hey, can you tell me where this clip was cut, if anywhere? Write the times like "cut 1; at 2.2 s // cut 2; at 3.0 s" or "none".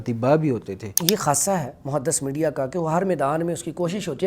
cut 1; at 1.0 s